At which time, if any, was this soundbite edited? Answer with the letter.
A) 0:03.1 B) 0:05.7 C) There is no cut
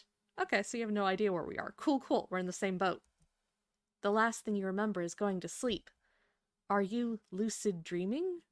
C